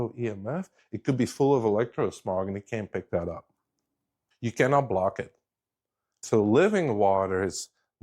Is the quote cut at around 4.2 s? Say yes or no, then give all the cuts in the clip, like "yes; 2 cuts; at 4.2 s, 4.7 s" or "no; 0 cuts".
yes; 2 cuts; at 4.2 s, 6.2 s